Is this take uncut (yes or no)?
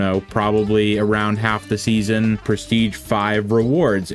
no